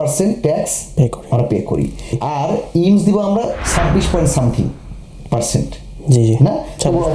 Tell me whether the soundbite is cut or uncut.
cut